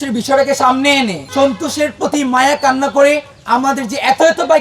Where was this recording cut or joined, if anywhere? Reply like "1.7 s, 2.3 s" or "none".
1.2 s, 3.3 s